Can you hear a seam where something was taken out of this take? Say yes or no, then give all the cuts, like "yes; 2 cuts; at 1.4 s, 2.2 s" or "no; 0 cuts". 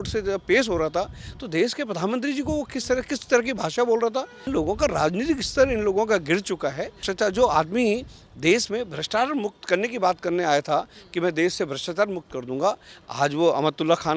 yes; 2 cuts; at 4.5 s, 7.0 s